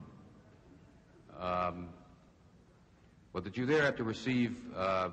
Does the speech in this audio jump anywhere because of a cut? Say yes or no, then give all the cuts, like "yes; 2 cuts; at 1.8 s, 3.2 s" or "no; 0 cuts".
no; 0 cuts